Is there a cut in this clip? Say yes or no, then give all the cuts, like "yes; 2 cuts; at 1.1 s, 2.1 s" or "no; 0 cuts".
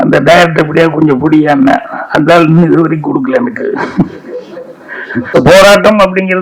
yes; 1 cut; at 5.3 s